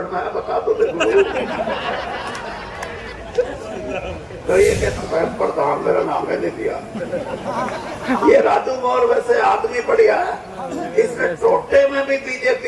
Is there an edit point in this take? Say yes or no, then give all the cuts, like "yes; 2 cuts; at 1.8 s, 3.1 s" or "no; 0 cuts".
yes; 1 cut; at 5.0 s